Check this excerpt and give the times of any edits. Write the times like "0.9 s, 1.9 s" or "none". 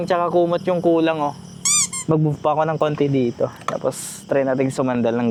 none